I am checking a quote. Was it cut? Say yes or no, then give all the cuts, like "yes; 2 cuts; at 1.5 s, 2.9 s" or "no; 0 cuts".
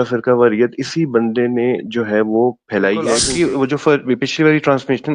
yes; 1 cut; at 3.3 s